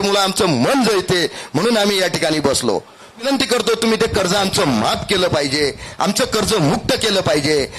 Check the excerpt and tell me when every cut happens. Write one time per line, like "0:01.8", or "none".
0:03.2